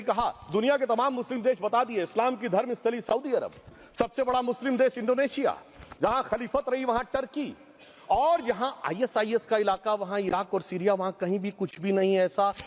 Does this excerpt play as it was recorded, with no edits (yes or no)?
yes